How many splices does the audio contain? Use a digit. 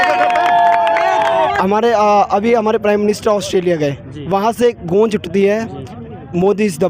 1